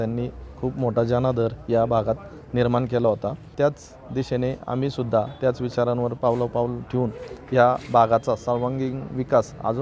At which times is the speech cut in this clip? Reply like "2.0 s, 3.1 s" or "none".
3.4 s